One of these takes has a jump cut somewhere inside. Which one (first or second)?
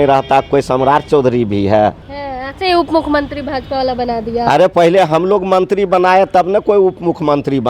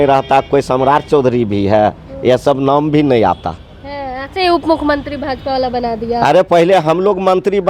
first